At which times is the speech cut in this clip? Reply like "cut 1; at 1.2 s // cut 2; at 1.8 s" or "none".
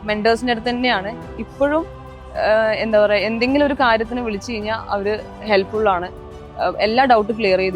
none